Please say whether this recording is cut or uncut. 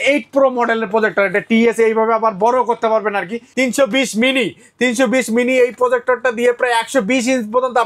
cut